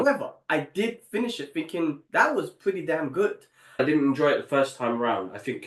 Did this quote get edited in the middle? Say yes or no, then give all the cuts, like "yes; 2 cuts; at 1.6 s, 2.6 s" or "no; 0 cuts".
yes; 1 cut; at 3.8 s